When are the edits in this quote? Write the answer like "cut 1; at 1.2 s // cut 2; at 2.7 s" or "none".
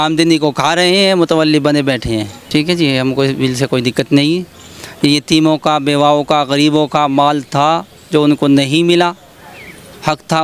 cut 1; at 2.4 s

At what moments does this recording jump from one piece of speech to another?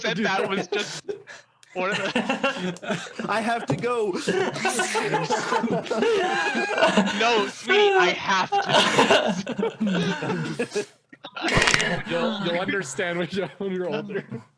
none

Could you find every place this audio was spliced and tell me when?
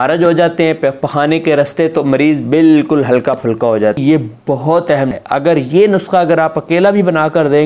cut 1; at 4.0 s // cut 2; at 5.2 s

